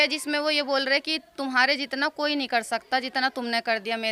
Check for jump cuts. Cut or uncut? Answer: uncut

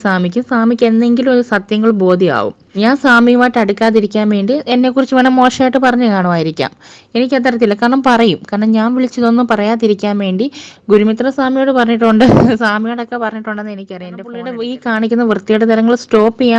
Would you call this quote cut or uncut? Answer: cut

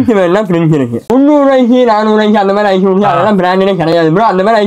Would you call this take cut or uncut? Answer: cut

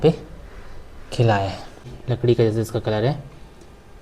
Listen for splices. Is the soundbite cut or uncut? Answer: cut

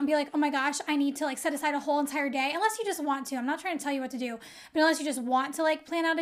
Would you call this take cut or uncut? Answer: uncut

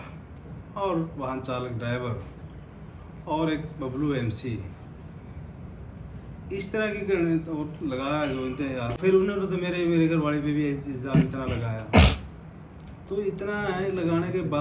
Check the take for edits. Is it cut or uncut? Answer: cut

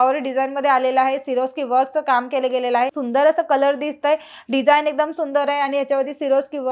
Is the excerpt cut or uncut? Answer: cut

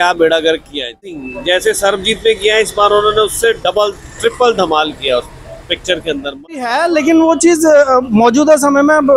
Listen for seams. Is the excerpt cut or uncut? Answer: cut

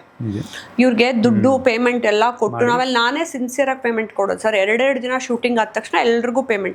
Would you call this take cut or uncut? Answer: uncut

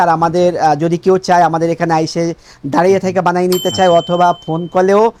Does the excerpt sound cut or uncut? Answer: uncut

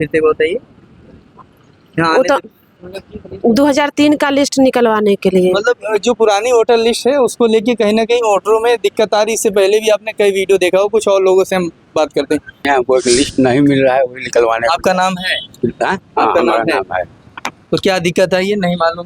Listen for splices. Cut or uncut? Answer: cut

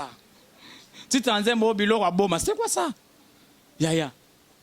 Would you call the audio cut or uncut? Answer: uncut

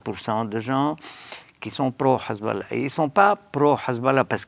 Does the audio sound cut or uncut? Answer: uncut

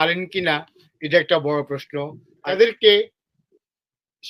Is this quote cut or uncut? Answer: cut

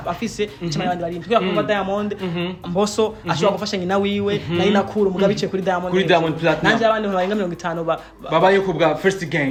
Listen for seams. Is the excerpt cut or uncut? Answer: uncut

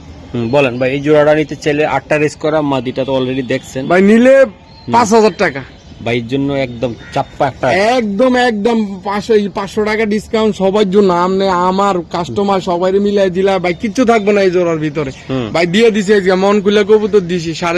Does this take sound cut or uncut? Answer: uncut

